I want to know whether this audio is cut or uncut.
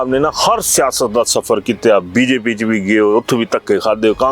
uncut